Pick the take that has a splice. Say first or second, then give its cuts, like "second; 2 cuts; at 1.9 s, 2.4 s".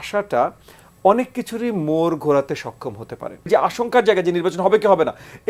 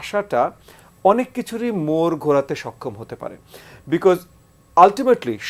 first; 1 cut; at 3.5 s